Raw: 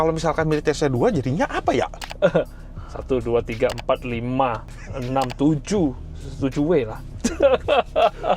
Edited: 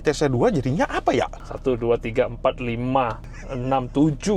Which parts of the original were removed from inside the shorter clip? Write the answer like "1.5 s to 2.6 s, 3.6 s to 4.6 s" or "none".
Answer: 2.0 s to 2.9 s

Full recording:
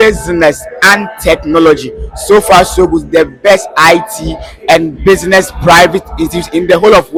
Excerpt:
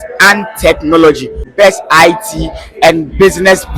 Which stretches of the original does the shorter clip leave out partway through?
2.1 s to 3.3 s

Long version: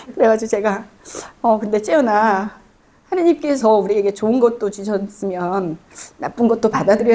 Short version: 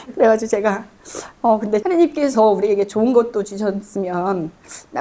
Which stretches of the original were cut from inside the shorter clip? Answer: 1.8 s to 3.1 s

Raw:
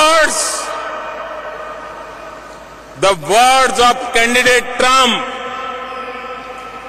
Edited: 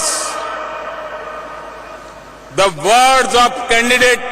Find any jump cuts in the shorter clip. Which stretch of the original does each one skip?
2.3 s to 2.4 s

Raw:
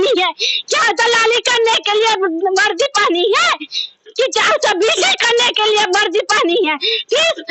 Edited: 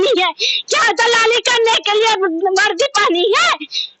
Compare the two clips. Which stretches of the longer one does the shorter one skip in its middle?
none

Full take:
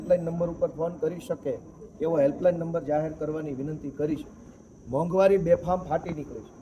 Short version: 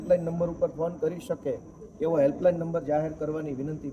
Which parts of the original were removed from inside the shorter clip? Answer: none

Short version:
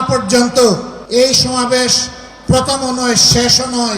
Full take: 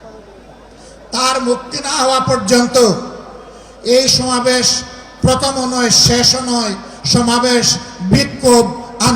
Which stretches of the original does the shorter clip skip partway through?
3.1 s to 3.7 s

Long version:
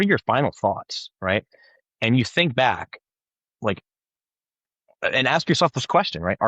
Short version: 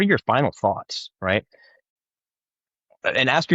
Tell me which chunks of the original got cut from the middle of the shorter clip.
1.9 s to 3.9 s

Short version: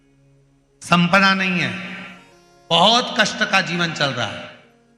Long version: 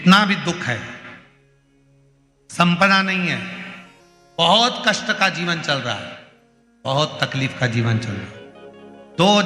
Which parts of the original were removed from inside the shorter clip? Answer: none

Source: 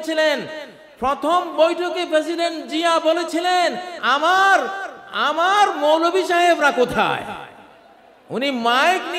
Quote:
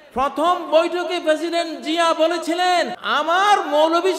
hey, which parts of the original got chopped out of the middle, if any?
3.9 s to 5.1 s

